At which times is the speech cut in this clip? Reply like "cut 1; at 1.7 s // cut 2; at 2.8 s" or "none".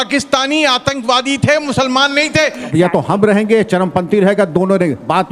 cut 1; at 2.6 s